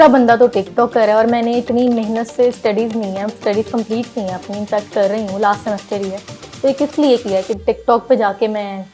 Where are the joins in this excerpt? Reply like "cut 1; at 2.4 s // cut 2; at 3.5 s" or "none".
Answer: none